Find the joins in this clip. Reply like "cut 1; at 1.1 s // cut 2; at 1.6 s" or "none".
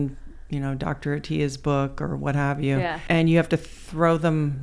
cut 1; at 3.0 s